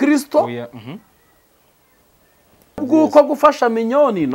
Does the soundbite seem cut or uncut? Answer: cut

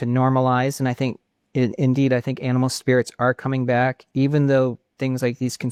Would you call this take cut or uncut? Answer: uncut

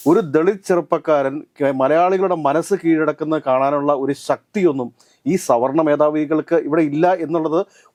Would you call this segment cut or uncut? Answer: uncut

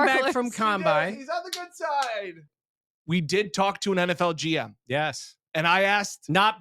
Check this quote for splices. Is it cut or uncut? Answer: cut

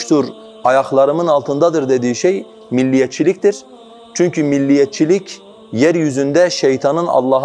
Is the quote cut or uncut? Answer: uncut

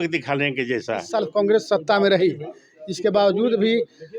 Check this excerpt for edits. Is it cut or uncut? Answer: cut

